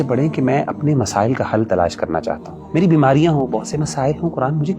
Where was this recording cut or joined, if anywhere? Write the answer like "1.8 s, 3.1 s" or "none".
2.5 s